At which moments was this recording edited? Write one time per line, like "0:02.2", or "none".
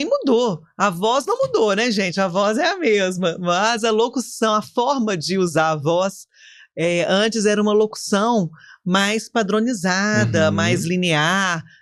none